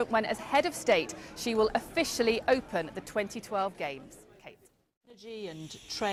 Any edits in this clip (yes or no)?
no